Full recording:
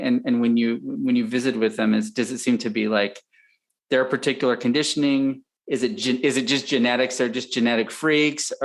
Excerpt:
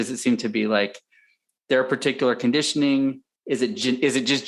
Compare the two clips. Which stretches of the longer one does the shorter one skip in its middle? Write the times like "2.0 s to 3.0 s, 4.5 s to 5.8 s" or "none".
none

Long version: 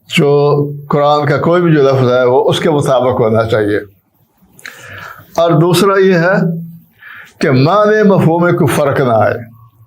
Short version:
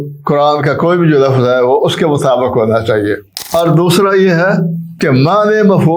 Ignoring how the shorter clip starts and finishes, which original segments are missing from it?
4.0 s to 5.2 s, 6.7 s to 7.2 s

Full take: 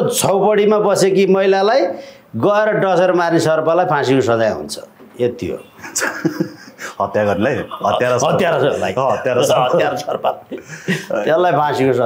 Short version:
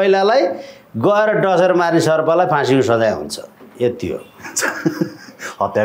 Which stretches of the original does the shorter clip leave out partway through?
none

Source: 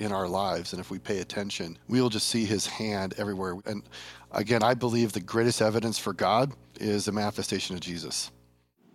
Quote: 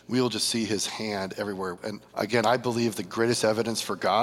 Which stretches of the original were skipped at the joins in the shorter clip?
3.6 s to 4.0 s

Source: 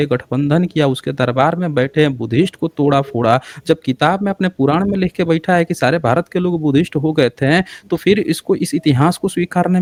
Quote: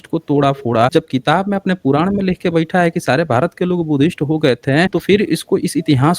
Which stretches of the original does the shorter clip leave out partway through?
3.4 s to 3.6 s, 7.7 s to 7.9 s

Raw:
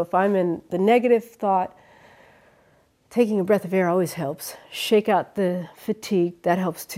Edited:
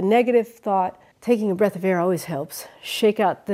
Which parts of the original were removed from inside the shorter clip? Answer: 1.8 s to 3.0 s

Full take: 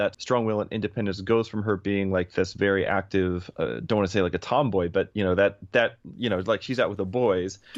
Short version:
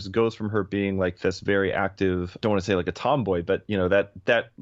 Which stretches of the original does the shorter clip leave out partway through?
3.5 s to 3.8 s

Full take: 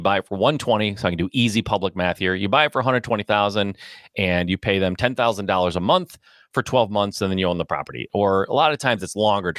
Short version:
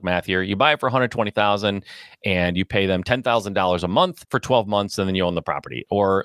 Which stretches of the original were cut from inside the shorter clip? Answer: 6.2 s to 6.5 s

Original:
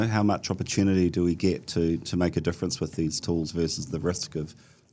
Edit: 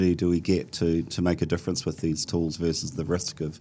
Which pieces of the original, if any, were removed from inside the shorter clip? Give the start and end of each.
none

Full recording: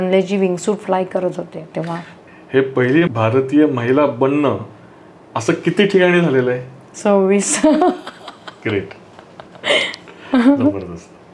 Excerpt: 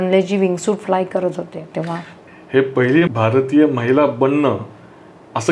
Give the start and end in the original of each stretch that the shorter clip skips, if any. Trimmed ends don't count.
none

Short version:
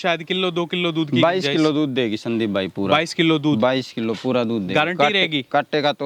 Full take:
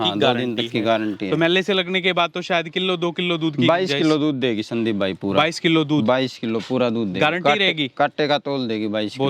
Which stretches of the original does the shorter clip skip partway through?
none

